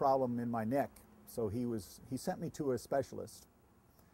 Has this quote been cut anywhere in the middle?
no; 0 cuts

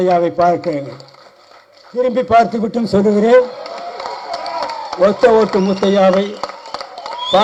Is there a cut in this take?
no; 0 cuts

